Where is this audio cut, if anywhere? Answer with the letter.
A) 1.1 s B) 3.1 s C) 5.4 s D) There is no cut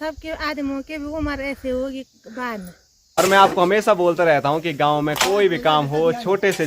B